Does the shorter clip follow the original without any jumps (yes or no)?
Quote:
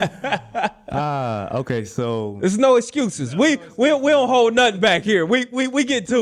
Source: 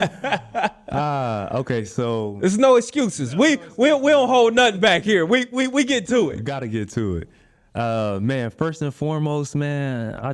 yes